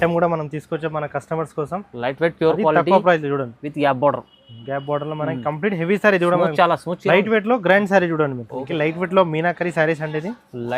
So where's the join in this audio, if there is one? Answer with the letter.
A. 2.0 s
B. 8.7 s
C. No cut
B